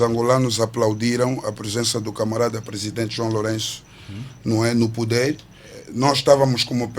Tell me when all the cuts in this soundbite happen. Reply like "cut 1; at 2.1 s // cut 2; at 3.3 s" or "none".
cut 1; at 5.8 s